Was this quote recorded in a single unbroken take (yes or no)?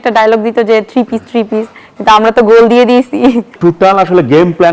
no